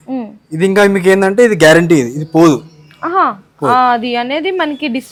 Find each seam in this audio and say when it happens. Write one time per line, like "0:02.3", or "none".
none